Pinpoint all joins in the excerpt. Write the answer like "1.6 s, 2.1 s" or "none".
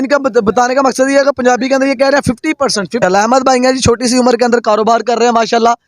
3.0 s